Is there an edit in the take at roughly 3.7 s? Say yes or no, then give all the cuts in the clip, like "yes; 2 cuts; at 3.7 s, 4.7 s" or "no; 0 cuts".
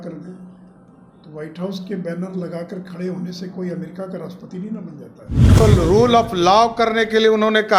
no; 1 cut; at 5.6 s